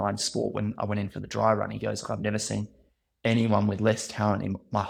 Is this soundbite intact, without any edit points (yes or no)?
yes